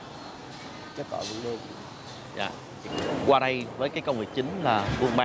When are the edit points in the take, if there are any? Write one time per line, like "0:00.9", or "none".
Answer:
0:02.9